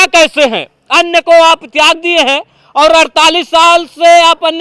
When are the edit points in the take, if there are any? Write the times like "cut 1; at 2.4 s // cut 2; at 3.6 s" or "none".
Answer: none